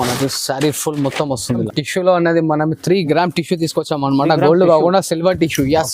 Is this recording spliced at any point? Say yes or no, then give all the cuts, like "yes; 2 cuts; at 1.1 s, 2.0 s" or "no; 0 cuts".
yes; 1 cut; at 1.6 s